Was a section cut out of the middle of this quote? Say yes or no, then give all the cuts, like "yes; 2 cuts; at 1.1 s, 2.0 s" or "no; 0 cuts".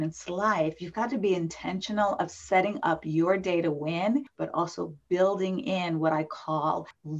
no; 0 cuts